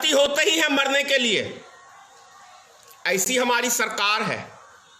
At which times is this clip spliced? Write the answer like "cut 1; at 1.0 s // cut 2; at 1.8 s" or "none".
none